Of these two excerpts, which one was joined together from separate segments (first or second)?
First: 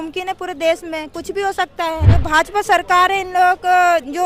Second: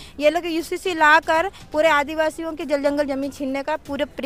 first